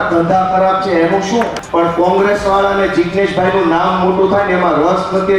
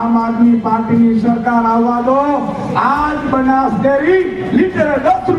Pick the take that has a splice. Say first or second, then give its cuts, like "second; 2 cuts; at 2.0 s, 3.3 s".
first; 1 cut; at 1.6 s